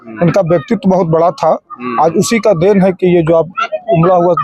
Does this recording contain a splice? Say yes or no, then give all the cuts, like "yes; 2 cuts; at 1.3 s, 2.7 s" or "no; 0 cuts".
no; 0 cuts